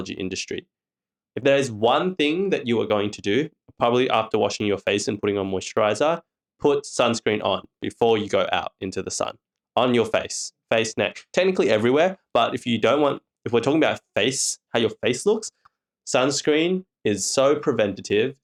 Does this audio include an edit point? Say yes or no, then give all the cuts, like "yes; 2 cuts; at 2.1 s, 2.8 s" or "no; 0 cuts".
no; 0 cuts